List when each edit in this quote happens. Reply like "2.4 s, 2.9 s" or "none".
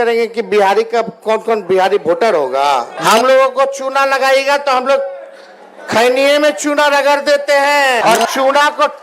2.9 s, 8.0 s